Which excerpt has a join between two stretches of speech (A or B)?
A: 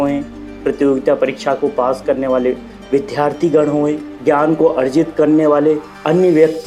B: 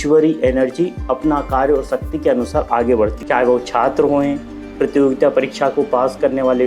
B